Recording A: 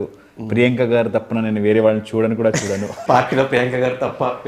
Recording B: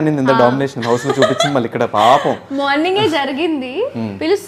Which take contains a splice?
A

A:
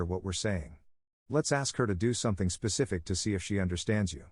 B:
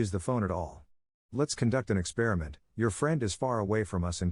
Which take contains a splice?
A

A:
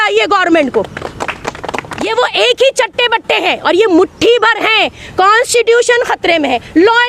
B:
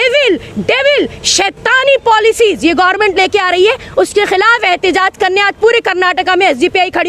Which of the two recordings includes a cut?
A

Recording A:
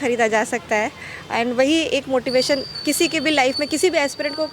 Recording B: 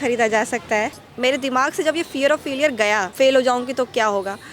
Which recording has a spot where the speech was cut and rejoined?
B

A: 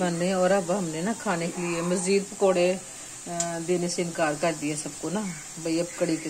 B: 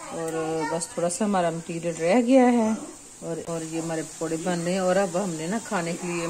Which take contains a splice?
B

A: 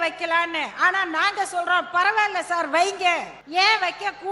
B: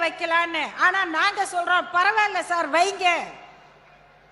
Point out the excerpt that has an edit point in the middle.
A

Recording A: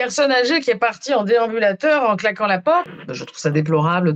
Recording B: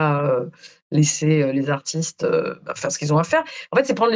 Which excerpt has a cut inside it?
A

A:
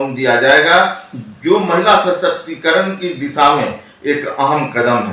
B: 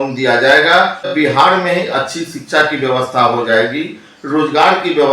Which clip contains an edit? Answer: B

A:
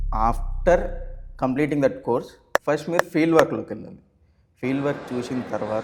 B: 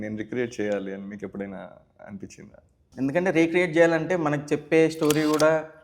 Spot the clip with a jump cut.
B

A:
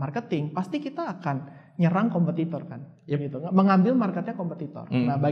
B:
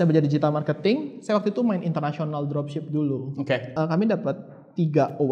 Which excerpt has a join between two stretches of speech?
B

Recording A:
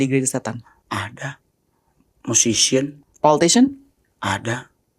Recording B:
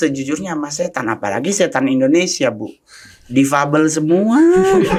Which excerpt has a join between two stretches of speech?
A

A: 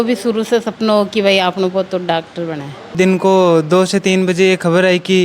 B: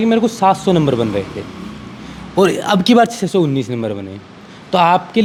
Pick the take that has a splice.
A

